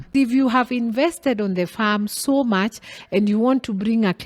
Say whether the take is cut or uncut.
uncut